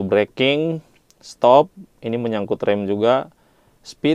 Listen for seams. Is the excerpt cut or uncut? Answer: uncut